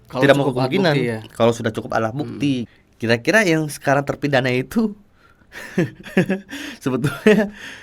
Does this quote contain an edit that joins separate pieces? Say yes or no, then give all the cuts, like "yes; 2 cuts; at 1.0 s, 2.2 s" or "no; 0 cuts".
yes; 1 cut; at 2.7 s